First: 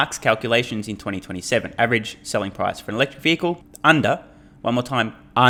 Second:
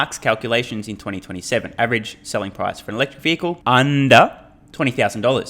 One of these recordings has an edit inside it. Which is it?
second; 1 cut; at 3.6 s

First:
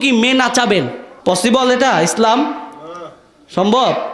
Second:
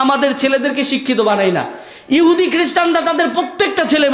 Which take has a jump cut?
first; 1 cut; at 1.0 s

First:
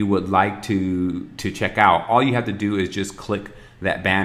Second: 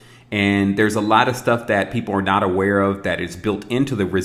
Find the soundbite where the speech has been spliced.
first; 1 cut; at 3.2 s

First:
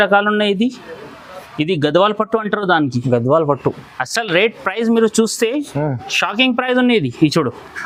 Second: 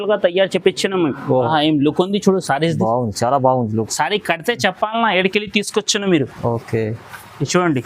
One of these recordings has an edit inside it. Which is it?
second; 1 cut; at 1.5 s

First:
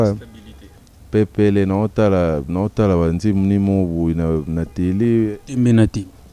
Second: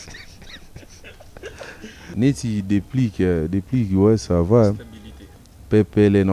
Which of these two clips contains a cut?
second; 1 cut; at 2.0 s

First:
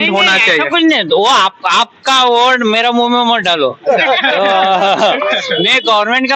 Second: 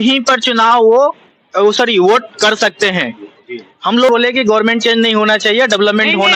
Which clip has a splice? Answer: second; 1 cut; at 4.1 s

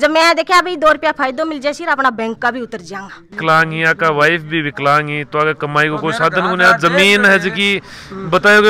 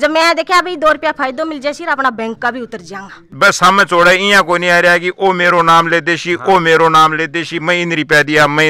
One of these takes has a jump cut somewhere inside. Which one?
second; 1 cut; at 3.3 s

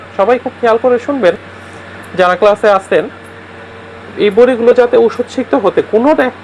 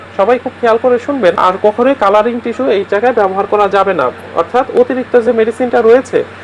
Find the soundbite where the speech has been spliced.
second; 1 cut; at 1.4 s

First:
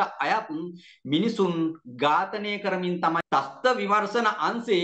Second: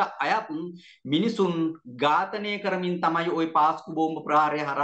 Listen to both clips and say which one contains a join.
first; 1 cut; at 3.2 s

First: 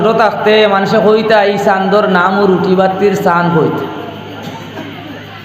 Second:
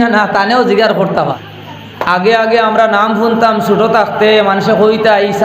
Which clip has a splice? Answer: second; 1 cut; at 1.3 s

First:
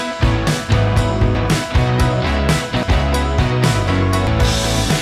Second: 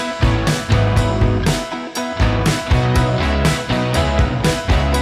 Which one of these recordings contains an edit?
first; 3 cuts; at 1.4 s, 2.8 s, 4.3 s

